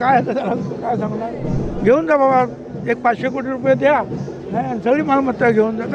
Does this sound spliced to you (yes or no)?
no